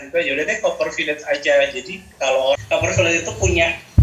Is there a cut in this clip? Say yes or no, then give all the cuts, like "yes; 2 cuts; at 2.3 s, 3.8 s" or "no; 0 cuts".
yes; 1 cut; at 2.5 s